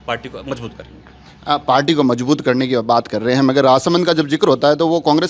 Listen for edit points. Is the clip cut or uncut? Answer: uncut